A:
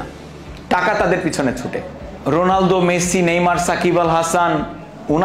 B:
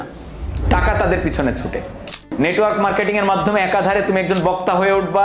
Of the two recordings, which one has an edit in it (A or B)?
B